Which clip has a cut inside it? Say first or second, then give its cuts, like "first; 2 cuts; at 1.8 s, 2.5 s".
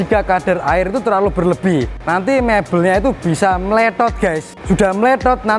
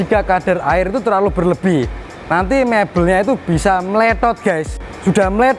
first; 2 cuts; at 2.0 s, 4.5 s